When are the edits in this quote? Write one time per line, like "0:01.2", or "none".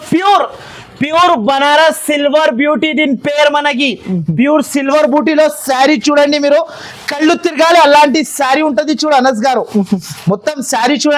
none